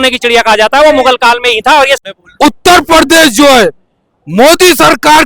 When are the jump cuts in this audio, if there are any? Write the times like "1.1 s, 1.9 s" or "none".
2.0 s